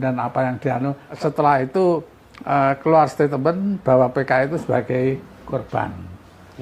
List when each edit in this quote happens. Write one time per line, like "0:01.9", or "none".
0:01.0

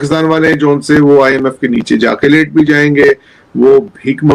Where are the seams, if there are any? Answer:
none

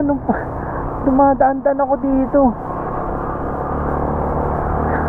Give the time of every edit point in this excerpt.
none

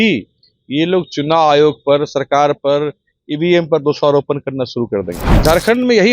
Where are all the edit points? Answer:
0:05.2

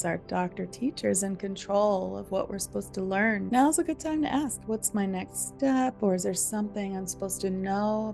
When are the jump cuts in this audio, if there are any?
0:03.5

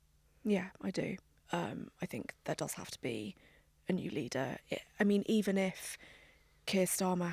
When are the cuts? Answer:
0:01.3

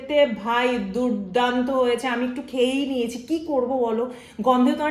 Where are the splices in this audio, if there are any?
none

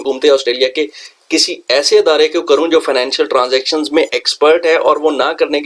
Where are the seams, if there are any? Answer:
none

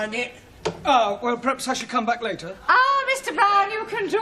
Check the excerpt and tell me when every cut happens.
0:02.3

